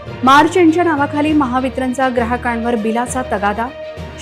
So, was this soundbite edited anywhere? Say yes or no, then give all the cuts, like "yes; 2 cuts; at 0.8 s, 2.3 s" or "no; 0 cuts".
no; 0 cuts